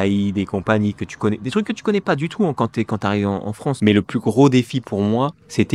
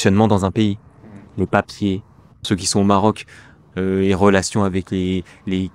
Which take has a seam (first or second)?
first